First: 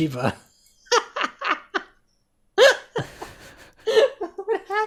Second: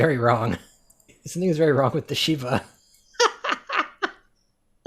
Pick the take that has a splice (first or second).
second